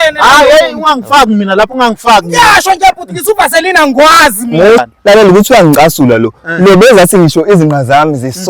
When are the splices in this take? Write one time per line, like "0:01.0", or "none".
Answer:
0:04.8